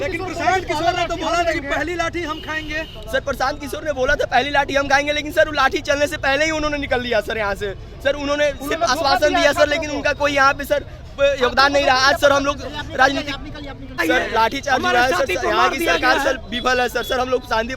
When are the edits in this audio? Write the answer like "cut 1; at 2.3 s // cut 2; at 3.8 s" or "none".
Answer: cut 1; at 14.0 s